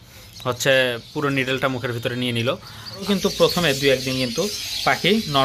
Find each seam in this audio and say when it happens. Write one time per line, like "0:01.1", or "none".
0:03.0